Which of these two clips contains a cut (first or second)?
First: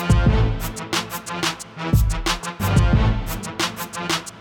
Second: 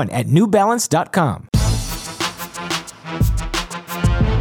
second